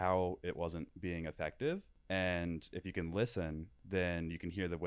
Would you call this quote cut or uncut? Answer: cut